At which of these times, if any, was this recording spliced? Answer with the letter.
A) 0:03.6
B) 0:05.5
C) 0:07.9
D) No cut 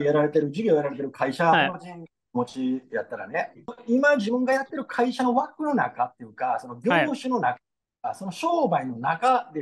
A